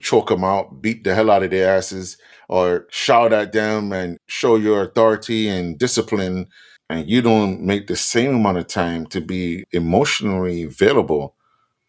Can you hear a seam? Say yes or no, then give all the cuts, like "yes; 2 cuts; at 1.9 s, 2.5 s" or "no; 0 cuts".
yes; 1 cut; at 9.6 s